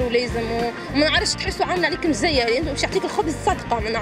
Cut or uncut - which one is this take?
uncut